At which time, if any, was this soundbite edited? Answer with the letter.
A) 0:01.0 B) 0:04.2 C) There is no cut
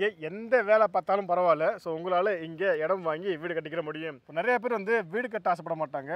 B